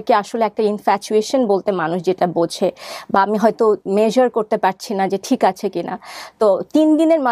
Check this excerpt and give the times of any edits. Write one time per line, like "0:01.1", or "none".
none